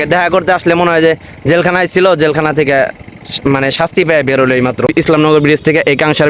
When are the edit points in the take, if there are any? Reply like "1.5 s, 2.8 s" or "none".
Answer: 4.9 s